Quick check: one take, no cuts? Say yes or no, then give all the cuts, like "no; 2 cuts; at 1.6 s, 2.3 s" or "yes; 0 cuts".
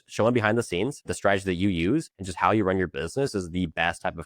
no; 2 cuts; at 1.1 s, 2.2 s